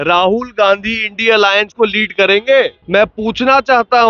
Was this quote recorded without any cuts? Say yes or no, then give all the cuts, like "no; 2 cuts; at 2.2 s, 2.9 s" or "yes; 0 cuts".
no; 1 cut; at 2.8 s